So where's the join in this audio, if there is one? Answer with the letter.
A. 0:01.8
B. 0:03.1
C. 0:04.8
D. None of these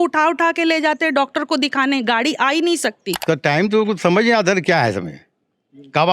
B